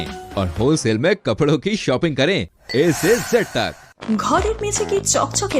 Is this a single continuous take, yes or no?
no